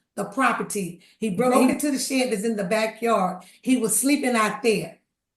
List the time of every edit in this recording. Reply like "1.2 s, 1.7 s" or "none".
1.5 s